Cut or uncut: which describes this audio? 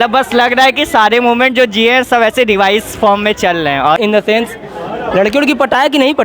cut